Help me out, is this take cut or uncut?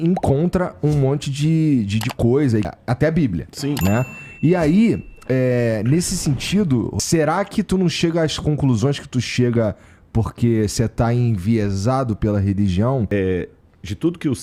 uncut